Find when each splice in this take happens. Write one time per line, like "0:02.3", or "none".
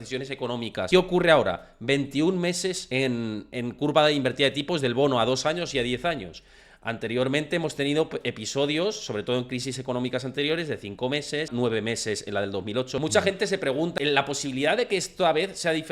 0:00.9
0:02.8
0:11.5
0:13.0
0:13.9